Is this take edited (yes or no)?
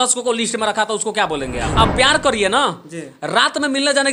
yes